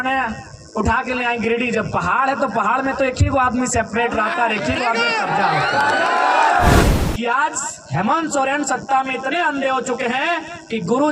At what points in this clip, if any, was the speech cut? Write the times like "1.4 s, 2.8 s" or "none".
6.8 s